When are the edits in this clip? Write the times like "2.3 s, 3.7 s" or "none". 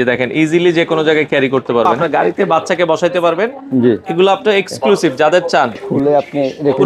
1.9 s, 5.9 s